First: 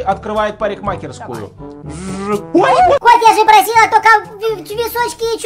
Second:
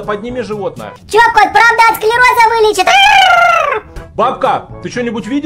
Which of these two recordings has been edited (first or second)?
first